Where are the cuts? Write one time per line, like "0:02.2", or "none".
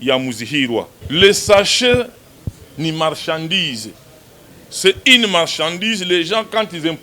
0:01.0